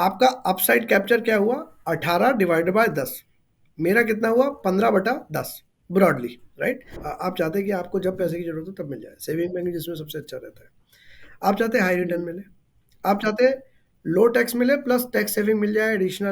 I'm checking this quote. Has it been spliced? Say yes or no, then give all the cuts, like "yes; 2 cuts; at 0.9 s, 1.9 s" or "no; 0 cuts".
yes; 1 cut; at 6.9 s